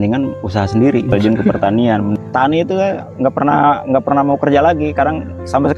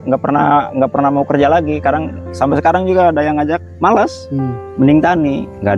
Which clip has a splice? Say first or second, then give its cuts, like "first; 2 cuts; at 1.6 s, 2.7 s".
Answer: first; 2 cuts; at 1.1 s, 2.2 s